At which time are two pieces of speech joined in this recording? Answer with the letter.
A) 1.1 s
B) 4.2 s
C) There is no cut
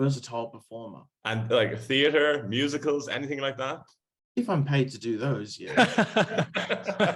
A